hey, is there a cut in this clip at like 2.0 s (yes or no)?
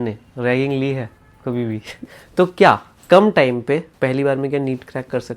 yes